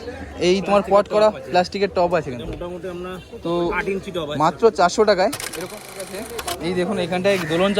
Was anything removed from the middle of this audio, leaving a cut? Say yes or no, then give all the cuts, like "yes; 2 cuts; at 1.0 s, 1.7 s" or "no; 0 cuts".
yes; 1 cut; at 5.9 s